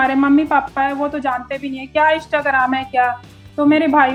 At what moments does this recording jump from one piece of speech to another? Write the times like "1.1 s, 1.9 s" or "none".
none